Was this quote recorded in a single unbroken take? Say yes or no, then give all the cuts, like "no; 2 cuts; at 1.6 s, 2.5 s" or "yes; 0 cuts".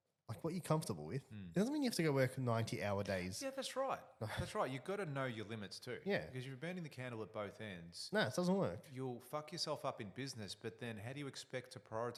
yes; 0 cuts